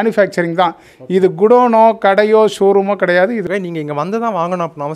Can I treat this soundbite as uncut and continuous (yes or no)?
no